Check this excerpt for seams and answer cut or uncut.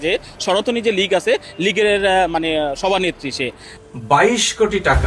cut